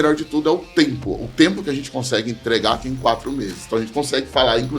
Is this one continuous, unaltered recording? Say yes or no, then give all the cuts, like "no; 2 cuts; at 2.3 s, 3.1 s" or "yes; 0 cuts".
yes; 0 cuts